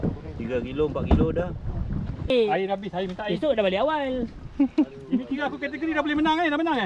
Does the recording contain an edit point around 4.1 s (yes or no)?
no